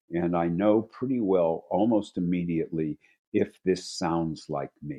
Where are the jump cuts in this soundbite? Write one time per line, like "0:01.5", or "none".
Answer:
none